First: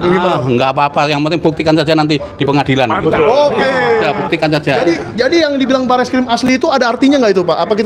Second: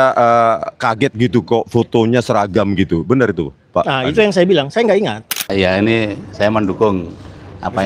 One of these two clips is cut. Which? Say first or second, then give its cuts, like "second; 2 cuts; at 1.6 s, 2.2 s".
second; 1 cut; at 5.4 s